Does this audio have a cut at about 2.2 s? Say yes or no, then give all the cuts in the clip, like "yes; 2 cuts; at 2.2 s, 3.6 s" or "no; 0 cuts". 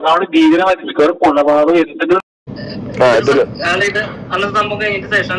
yes; 1 cut; at 2.2 s